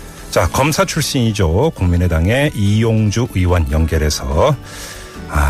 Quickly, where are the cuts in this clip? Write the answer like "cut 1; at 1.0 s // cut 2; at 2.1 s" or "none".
cut 1; at 1.5 s

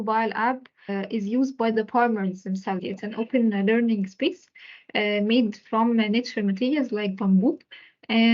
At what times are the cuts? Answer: cut 1; at 0.9 s // cut 2; at 2.9 s

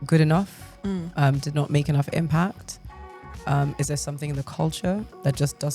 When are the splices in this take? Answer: none

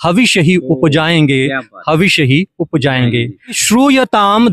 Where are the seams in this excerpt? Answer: cut 1; at 3.6 s

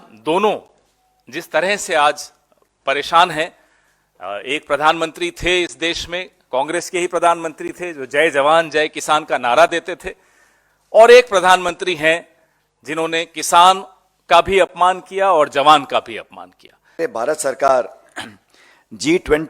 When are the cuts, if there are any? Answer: cut 1; at 17.0 s

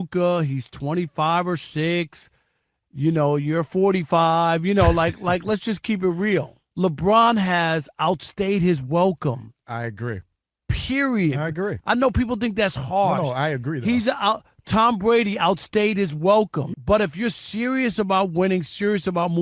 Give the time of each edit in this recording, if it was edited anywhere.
cut 1; at 6.6 s // cut 2; at 16.6 s

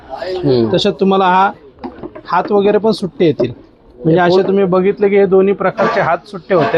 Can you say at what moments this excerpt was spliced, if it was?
none

